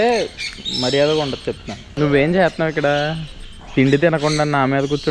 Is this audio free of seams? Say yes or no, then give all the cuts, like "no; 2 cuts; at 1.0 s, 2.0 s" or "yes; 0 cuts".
no; 2 cuts; at 1.8 s, 3.6 s